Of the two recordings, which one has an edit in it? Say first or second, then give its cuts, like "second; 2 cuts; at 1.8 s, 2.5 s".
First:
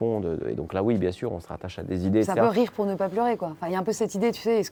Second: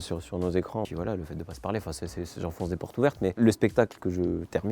second; 2 cuts; at 0.9 s, 3.4 s